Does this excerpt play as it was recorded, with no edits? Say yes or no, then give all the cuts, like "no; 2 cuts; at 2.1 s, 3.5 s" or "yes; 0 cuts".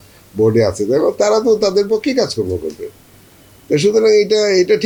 yes; 0 cuts